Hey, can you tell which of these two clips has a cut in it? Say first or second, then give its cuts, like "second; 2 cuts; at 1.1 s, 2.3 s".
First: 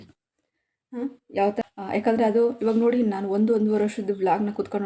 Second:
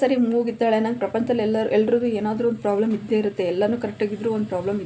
first; 1 cut; at 1.6 s